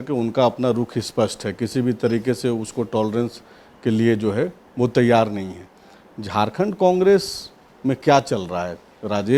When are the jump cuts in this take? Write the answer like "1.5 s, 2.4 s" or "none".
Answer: none